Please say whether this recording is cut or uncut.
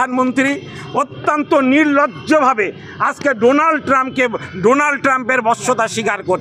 uncut